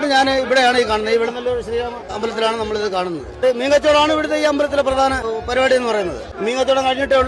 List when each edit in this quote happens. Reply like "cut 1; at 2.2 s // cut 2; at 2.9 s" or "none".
cut 1; at 2.1 s // cut 2; at 3.4 s // cut 3; at 5.2 s // cut 4; at 6.2 s